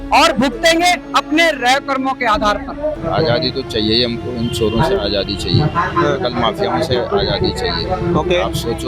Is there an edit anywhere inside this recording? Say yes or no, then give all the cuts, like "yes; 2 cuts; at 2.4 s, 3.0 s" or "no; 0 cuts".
yes; 1 cut; at 3.0 s